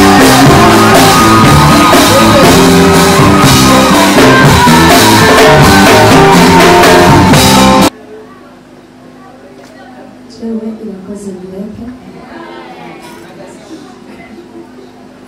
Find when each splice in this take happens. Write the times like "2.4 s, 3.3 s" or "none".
7.9 s